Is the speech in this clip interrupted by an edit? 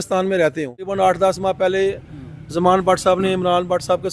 yes; 1 cut; at 0.9 s

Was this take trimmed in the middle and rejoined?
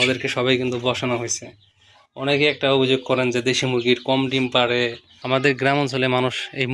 yes; 1 cut; at 5.1 s

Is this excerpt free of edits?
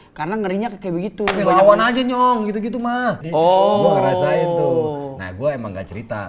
no; 1 cut; at 3.2 s

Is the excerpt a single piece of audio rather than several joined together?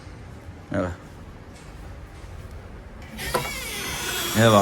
yes; 0 cuts

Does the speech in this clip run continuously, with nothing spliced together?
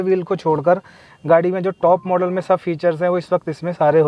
yes; 0 cuts

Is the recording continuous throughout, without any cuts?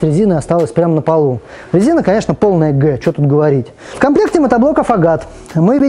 no; 1 cut; at 3.8 s

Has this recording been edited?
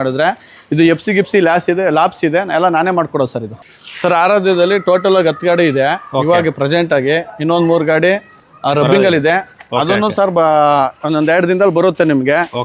yes; 1 cut; at 3.5 s

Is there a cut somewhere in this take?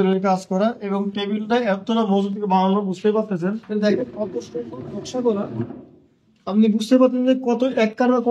yes; 1 cut; at 3.6 s

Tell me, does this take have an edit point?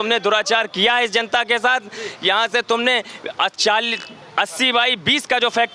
no; 0 cuts

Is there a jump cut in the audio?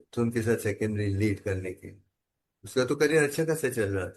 no; 0 cuts

